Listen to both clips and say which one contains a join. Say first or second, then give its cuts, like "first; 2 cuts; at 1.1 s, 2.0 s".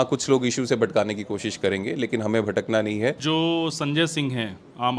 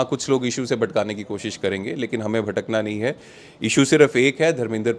first; 1 cut; at 3.2 s